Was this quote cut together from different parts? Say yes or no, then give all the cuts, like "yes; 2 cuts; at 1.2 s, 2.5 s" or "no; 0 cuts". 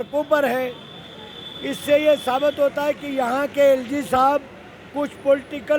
no; 0 cuts